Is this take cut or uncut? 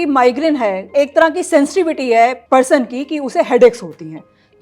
cut